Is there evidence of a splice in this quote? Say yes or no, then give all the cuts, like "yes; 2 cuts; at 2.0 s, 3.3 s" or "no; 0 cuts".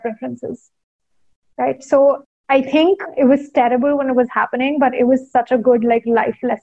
yes; 1 cut; at 2.8 s